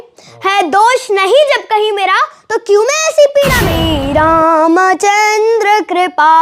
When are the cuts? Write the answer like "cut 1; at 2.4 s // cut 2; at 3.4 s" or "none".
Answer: cut 1; at 3.9 s

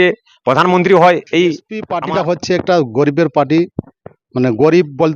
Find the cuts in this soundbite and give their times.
cut 1; at 1.9 s

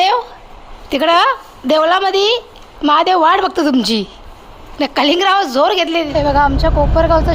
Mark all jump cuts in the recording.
cut 1; at 6.1 s

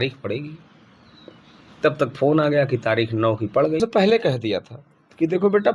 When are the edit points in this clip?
cut 1; at 3.8 s

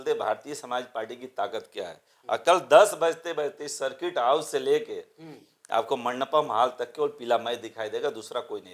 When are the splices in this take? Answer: none

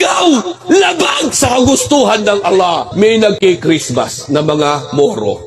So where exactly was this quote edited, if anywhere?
cut 1; at 2.9 s

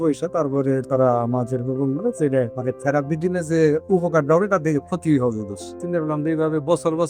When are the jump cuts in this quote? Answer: cut 1; at 2.5 s // cut 2; at 5.8 s

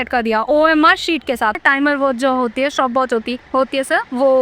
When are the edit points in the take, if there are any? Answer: cut 1; at 1.6 s // cut 2; at 3.4 s

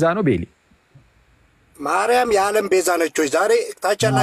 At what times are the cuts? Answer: none

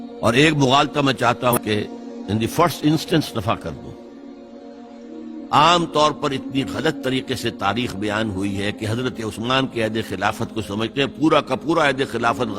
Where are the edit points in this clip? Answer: cut 1; at 1.5 s

